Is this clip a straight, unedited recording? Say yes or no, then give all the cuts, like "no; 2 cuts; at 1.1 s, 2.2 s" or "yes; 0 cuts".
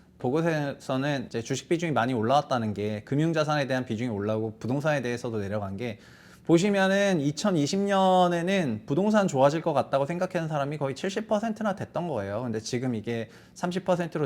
no; 1 cut; at 1.3 s